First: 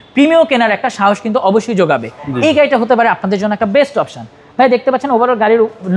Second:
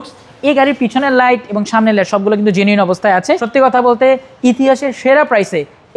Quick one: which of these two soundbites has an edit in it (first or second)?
second